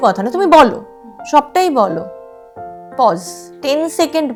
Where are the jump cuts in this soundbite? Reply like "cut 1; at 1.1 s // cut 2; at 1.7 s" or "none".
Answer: none